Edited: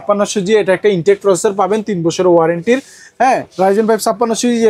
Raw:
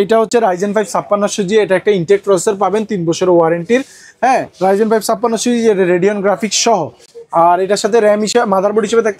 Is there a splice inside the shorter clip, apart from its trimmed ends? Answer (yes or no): no